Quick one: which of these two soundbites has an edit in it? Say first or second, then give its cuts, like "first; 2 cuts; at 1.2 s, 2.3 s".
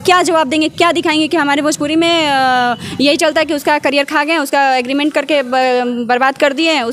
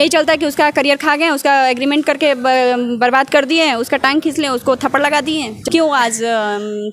second; 1 cut; at 5.6 s